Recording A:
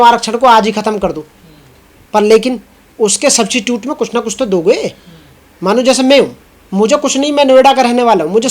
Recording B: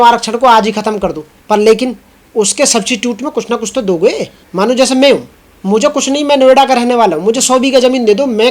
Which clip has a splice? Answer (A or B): B